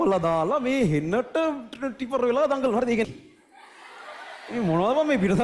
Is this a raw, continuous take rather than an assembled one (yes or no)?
no